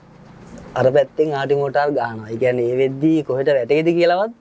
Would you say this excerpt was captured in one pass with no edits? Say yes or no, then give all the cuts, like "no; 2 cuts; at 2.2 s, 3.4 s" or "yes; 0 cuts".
yes; 0 cuts